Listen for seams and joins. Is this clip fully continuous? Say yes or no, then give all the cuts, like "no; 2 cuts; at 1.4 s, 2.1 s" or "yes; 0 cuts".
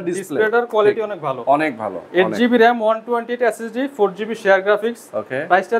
yes; 0 cuts